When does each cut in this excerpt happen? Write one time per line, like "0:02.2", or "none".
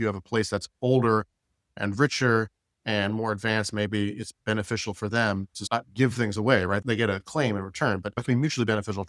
0:01.8
0:05.6
0:06.8
0:08.2